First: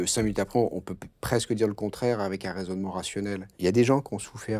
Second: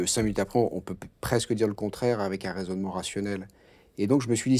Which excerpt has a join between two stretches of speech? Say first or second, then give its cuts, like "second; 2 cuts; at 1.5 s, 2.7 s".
first; 1 cut; at 3.5 s